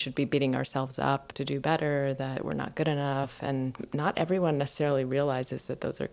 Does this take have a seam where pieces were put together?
yes; 3 cuts; at 1.3 s, 2.3 s, 3.4 s

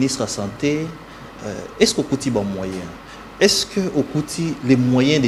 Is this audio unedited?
yes; 0 cuts

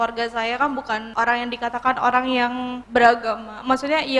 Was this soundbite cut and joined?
yes; 2 cuts; at 1.1 s, 2.7 s

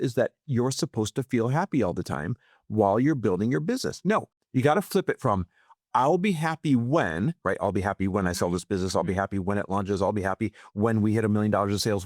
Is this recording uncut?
no; 1 cut; at 4.4 s

